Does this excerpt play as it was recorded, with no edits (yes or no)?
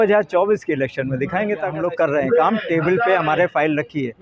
no